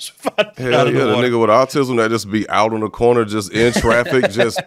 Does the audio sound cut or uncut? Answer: uncut